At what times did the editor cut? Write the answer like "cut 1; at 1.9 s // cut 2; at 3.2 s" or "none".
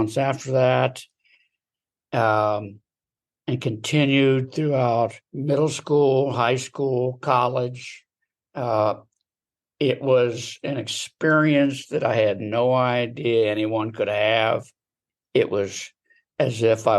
cut 1; at 5.3 s